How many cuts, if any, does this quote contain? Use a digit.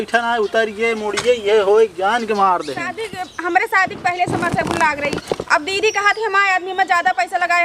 1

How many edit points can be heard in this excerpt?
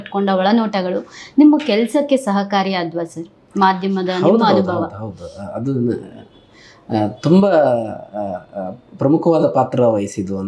0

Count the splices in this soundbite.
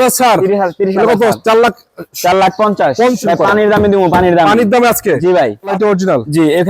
2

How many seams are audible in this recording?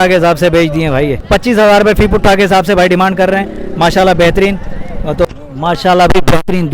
2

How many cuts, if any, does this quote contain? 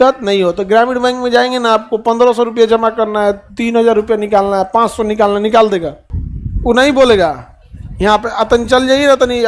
0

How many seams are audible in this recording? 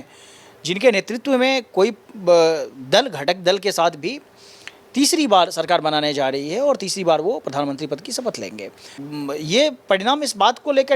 1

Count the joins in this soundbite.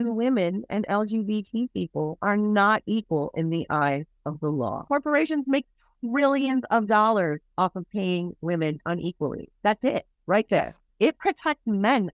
2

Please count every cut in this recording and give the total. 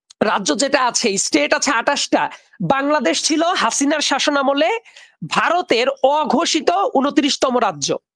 0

